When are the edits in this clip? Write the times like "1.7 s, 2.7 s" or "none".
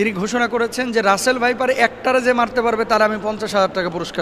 none